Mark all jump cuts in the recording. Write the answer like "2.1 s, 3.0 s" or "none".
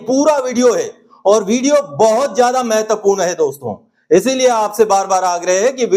none

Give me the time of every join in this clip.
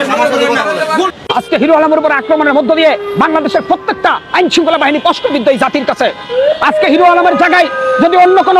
1.1 s

